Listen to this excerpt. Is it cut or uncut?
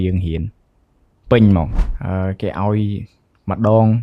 cut